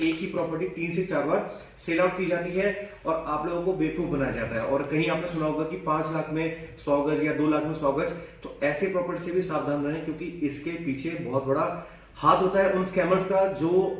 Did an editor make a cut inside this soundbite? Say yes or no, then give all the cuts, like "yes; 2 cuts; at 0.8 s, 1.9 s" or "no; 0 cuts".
no; 0 cuts